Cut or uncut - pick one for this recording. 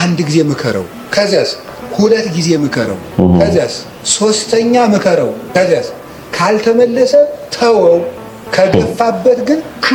uncut